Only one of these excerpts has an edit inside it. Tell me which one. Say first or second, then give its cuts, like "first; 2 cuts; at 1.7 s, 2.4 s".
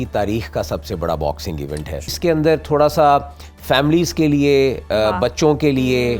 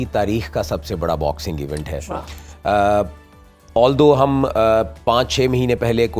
first; 1 cut; at 2.1 s